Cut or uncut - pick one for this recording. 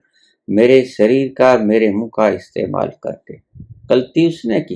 uncut